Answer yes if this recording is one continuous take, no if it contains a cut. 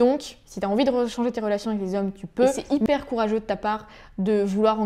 no